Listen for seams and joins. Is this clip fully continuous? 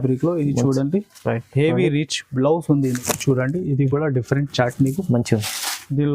no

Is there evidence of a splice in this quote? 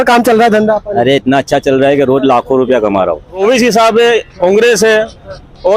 yes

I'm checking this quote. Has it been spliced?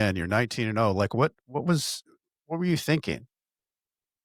no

